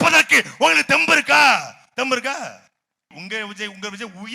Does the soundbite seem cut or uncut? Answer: cut